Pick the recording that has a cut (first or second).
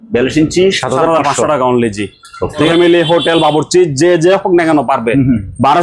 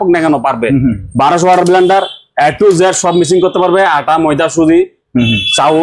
first